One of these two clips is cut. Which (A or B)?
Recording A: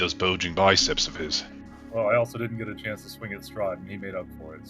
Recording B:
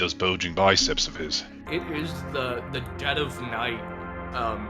B